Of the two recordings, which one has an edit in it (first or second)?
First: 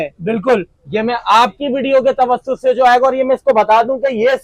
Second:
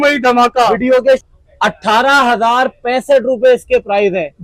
second